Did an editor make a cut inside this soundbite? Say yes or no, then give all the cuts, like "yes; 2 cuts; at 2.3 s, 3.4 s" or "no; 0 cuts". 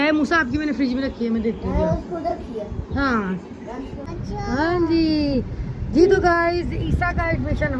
yes; 1 cut; at 4.0 s